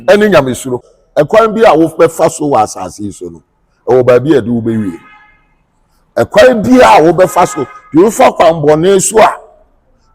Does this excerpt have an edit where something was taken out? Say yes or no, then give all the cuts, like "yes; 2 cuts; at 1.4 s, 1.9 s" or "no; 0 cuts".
yes; 1 cut; at 1.0 s